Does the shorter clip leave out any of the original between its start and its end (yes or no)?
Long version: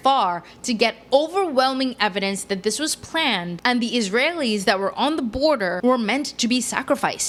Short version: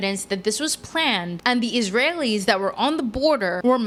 no